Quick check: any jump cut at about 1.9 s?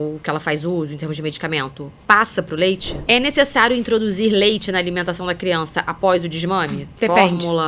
yes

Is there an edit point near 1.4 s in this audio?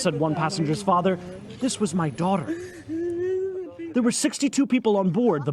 no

